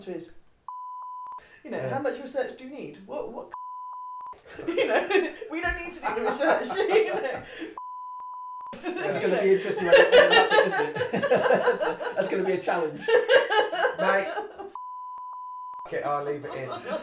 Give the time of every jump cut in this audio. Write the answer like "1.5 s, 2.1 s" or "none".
1.0 s, 3.9 s, 8.3 s, 15.3 s